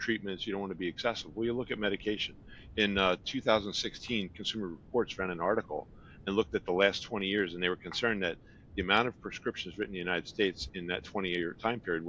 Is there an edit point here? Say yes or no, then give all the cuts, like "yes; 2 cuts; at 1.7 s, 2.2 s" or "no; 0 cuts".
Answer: no; 0 cuts